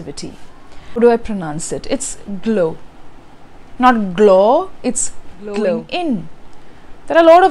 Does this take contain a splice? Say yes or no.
yes